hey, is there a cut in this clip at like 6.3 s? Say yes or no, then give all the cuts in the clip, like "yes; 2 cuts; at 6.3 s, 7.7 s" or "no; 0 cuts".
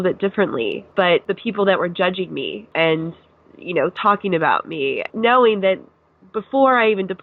no; 3 cuts; at 1.2 s, 2.6 s, 5.0 s